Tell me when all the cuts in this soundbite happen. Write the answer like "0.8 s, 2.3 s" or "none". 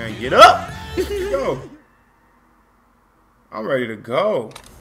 1.3 s